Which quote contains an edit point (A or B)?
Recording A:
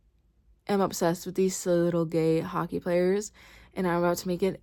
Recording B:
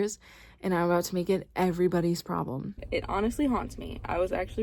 B